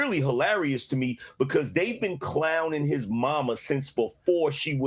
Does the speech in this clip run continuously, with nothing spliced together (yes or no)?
yes